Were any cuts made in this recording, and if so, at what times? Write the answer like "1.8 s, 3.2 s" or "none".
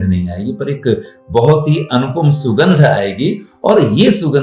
none